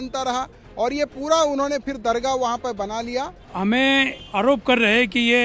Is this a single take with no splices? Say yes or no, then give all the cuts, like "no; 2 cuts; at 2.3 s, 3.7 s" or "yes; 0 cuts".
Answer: no; 2 cuts; at 3.4 s, 4.2 s